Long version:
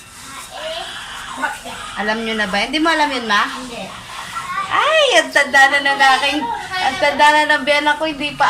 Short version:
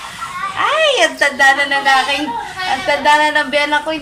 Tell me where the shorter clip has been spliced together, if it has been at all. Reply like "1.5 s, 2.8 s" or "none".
none